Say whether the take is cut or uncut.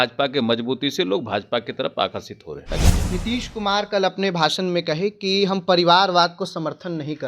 cut